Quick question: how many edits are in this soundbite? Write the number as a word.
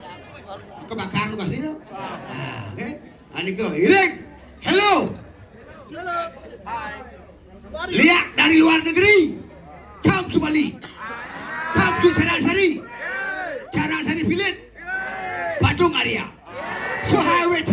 zero